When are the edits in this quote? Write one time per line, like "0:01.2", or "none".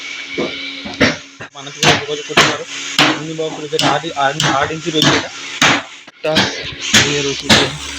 0:01.5
0:06.1